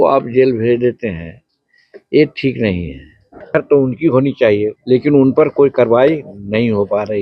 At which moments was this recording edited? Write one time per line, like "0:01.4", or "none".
0:03.4
0:04.8